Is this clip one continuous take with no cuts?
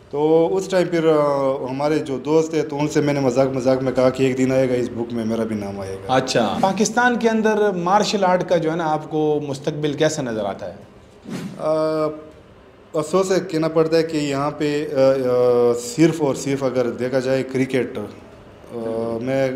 no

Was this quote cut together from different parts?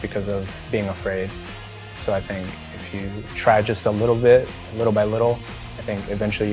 no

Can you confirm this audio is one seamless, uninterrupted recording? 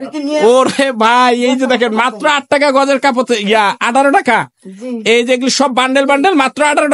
yes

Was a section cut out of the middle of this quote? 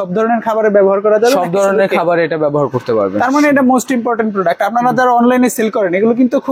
no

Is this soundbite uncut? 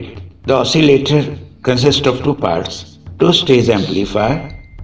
yes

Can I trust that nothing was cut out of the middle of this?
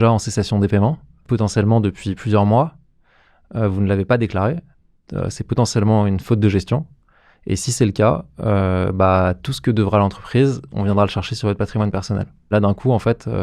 no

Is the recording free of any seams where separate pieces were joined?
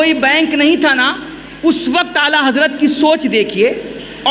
yes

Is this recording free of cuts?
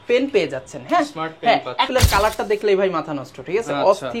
no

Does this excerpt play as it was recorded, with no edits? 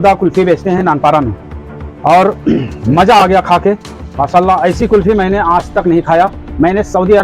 yes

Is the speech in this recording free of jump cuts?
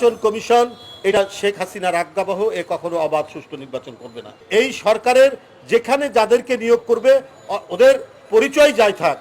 no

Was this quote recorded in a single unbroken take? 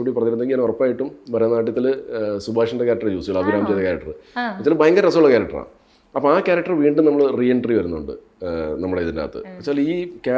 yes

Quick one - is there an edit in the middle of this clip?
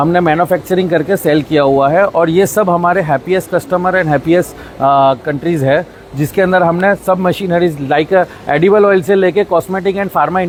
no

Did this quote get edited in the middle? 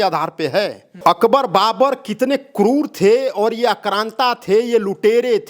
yes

